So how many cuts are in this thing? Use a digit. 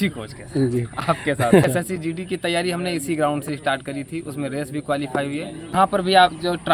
2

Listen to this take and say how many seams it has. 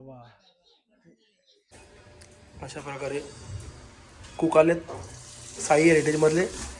1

